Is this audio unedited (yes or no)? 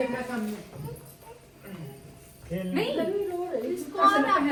yes